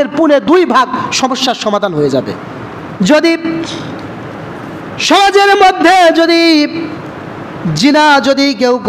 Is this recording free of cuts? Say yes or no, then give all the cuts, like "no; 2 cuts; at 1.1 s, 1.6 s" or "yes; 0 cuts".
no; 1 cut; at 2.8 s